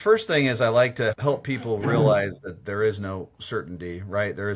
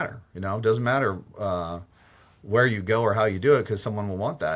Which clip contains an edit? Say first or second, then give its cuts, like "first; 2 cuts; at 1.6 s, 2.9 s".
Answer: first; 1 cut; at 1.1 s